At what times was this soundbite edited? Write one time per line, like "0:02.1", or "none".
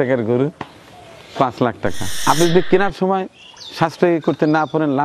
0:02.1